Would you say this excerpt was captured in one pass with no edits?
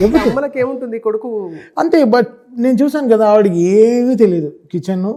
yes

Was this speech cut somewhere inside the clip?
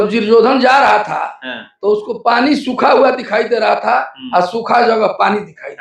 no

